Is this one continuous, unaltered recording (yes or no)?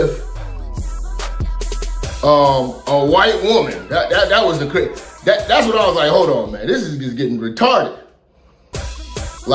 no